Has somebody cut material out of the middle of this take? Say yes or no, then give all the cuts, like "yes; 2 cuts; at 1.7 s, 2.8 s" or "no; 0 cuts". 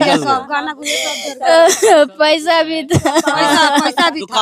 no; 0 cuts